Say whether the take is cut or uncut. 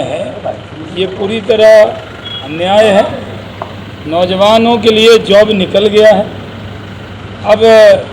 uncut